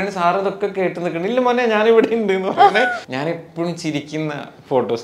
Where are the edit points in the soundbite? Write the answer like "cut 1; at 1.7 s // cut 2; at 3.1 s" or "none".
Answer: cut 1; at 3.0 s